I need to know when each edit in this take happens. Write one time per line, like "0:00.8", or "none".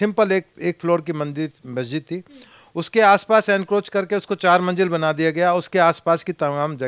none

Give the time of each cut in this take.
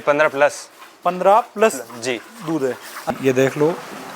0:03.1

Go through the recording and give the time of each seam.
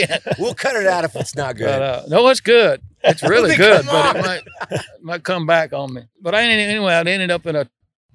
0:06.0

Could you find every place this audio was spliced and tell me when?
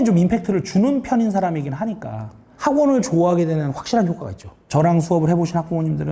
0:04.6

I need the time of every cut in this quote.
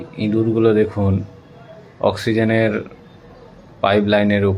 none

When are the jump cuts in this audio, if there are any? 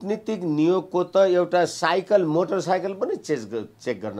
none

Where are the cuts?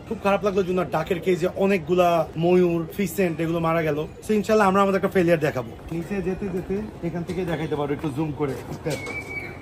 0:02.9
0:04.1
0:05.7

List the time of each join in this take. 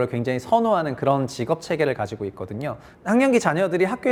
none

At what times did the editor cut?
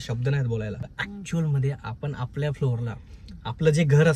0:01.0

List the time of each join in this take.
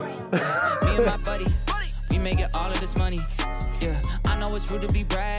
0:01.1

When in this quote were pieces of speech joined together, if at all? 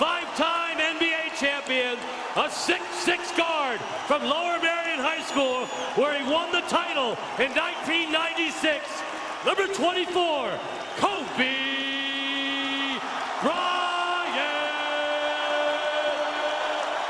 0:09.8

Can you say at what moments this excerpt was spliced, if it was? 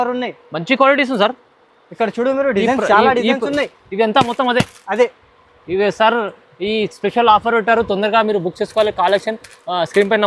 none

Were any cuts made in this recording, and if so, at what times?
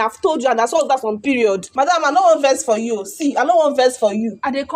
0:01.7

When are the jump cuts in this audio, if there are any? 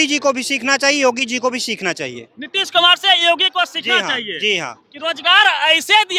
none

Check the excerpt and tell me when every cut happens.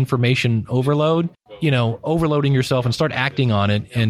0:01.4

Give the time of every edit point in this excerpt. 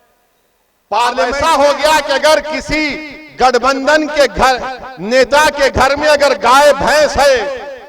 0:01.3

